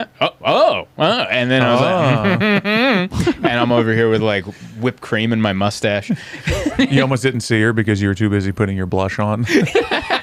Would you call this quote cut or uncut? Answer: uncut